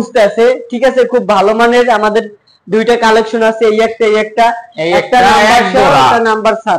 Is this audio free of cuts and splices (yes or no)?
yes